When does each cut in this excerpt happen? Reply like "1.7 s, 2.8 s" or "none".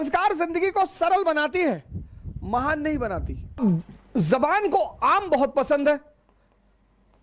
3.6 s